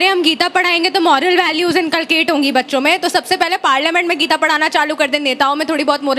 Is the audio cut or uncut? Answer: uncut